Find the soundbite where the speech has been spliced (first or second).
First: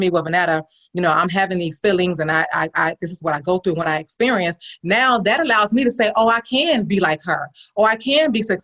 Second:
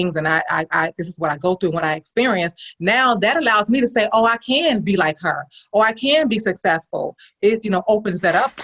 second